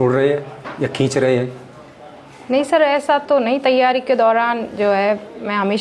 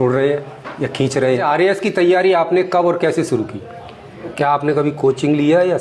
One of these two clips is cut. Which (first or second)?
second